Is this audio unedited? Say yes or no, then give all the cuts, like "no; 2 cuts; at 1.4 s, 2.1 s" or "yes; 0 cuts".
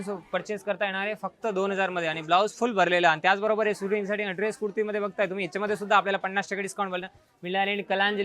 yes; 0 cuts